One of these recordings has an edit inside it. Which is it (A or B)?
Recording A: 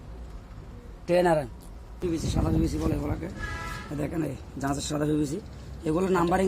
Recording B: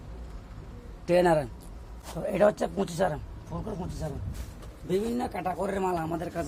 A